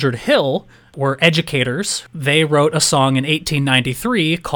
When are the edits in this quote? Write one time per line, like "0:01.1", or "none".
0:00.9
0:02.0

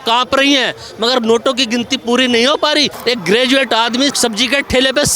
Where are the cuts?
0:02.9
0:04.1

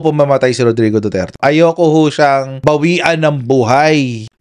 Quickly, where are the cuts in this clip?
0:01.4

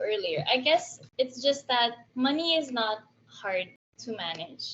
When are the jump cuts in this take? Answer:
0:01.0
0:02.0

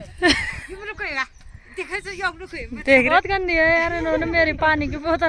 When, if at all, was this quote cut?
0:03.1

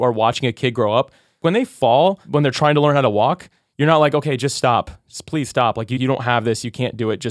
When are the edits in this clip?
0:01.4
0:02.2

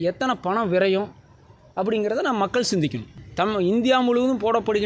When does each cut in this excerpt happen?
0:03.2

